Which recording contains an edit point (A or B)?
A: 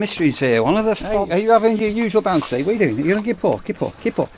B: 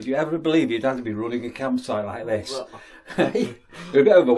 A